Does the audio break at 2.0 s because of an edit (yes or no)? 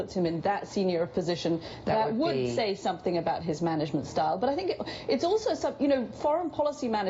no